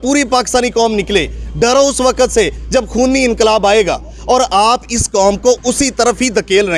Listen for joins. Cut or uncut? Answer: uncut